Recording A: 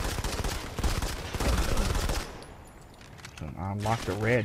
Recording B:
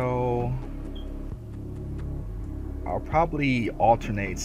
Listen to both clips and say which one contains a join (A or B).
A